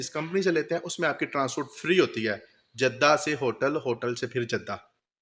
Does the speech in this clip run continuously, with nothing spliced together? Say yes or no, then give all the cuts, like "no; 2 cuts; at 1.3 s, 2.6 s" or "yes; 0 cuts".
yes; 0 cuts